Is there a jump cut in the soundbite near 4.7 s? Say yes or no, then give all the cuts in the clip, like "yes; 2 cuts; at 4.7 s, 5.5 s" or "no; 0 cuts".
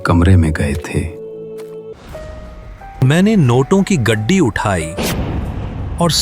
no; 1 cut; at 1.9 s